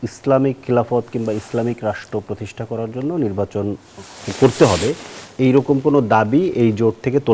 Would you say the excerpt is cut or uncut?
uncut